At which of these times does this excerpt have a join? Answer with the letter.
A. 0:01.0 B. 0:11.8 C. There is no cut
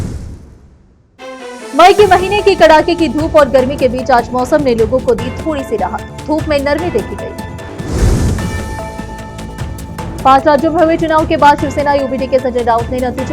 A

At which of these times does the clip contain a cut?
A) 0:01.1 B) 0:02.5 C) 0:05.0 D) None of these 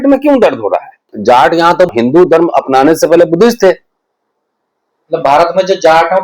A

